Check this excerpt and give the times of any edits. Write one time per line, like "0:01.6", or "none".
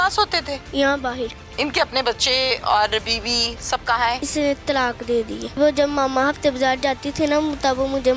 0:05.4